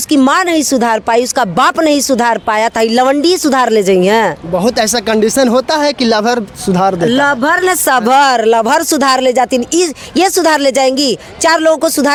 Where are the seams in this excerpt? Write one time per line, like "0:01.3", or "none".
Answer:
none